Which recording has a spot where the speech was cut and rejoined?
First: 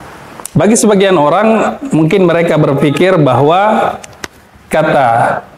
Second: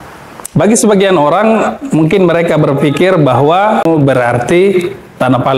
second; 1 cut; at 3.8 s

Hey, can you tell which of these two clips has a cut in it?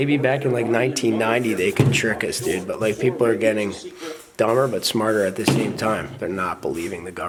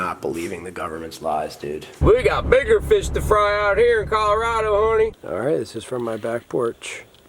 second; 2 cuts; at 1.9 s, 5.2 s

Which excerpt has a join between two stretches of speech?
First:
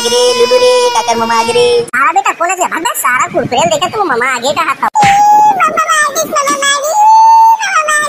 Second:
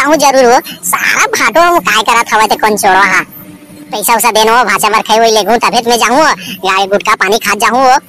second; 1 cut; at 4.0 s

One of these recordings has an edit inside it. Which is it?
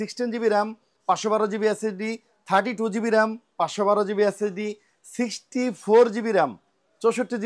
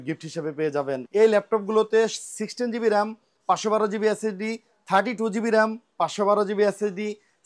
second; 1 cut; at 1.0 s

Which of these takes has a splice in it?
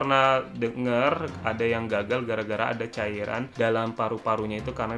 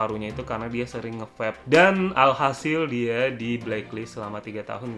second; 1 cut; at 1.6 s

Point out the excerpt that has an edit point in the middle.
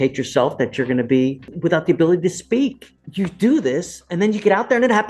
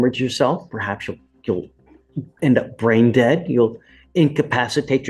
first; 2 cuts; at 1.5 s, 3.0 s

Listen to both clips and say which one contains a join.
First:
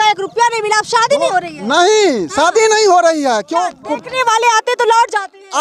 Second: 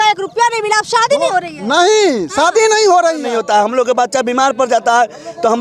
second; 1 cut; at 3.3 s

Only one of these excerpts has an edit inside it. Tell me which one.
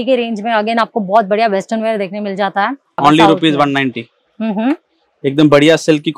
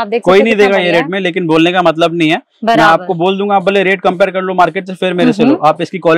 first; 1 cut; at 3.0 s

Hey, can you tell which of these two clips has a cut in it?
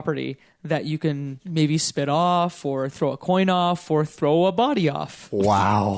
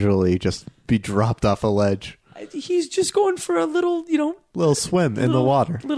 first; 1 cut; at 1.4 s

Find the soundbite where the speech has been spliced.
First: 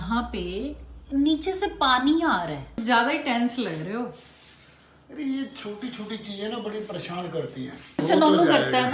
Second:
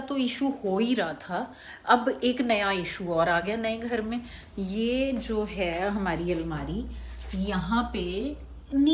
first; 1 cut; at 2.7 s

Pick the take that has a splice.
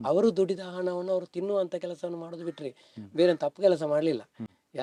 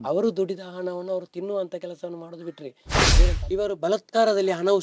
second; 1 cut; at 3.1 s

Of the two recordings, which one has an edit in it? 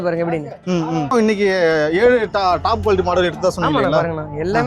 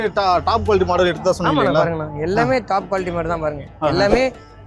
first; 1 cut; at 1.1 s

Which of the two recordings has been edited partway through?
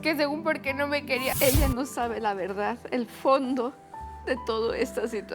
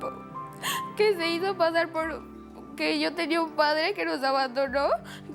first; 1 cut; at 1.3 s

